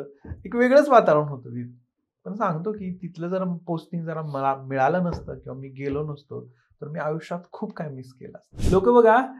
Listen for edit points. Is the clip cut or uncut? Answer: cut